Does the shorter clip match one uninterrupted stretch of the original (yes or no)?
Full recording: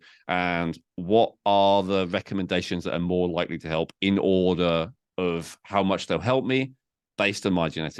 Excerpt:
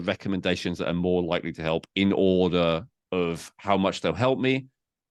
yes